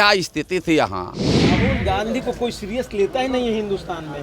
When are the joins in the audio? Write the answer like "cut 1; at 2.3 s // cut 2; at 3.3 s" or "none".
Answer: cut 1; at 1.6 s